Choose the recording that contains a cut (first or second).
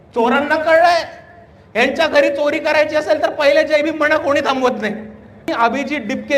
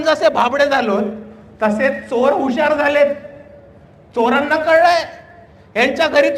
first